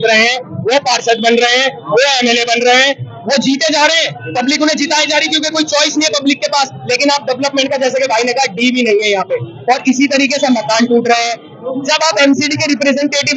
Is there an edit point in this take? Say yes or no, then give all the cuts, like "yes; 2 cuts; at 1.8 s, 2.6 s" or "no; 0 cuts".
no; 0 cuts